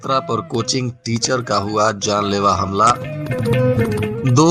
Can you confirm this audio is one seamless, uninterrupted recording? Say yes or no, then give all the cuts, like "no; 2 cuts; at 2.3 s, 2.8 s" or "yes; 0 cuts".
yes; 0 cuts